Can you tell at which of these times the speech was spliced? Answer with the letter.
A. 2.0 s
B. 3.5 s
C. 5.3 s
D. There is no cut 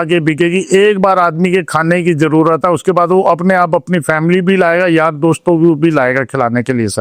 D